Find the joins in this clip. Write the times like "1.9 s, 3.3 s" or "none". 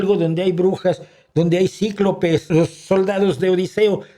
2.5 s